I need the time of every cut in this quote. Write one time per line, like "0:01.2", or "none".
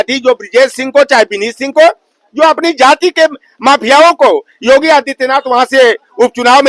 none